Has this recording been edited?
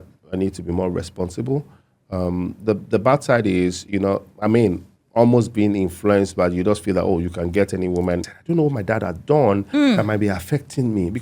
yes; 1 cut; at 8.3 s

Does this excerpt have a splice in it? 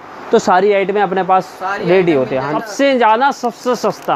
yes; 1 cut; at 2.5 s

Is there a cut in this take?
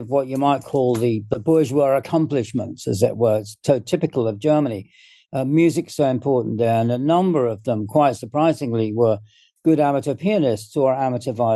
no; 0 cuts

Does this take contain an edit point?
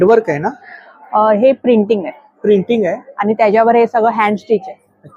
no; 0 cuts

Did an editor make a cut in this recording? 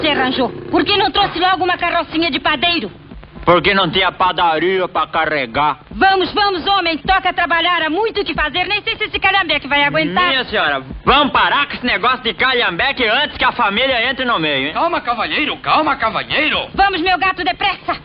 no; 0 cuts

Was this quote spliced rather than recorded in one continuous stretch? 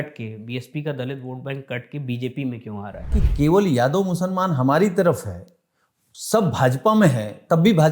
yes; 1 cut; at 3.1 s

